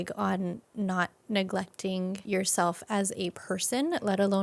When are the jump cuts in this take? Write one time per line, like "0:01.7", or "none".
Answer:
0:02.2
0:03.4